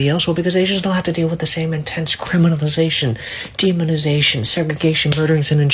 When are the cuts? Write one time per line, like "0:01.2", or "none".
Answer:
none